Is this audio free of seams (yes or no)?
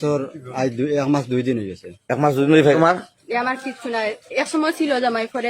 no